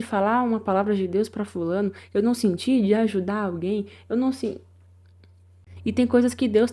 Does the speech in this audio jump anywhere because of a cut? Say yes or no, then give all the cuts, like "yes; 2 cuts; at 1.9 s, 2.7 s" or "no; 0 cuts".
no; 0 cuts